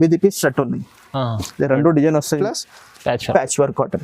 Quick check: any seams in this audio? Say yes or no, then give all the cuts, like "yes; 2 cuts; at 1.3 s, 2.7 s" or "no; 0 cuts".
yes; 1 cut; at 2.4 s